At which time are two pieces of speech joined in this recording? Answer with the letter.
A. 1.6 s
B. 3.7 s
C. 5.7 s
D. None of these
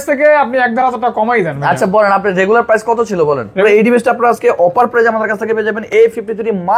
B